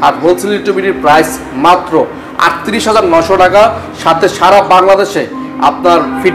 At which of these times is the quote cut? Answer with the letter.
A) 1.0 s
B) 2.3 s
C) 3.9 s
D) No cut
D